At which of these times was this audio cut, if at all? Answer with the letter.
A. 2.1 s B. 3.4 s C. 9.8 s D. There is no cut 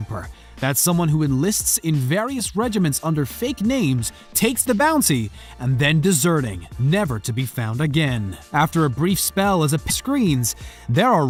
D